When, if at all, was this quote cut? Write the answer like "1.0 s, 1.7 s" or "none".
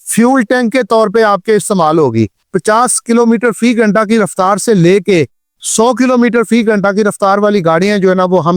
2.5 s